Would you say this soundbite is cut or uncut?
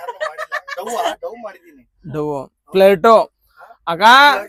uncut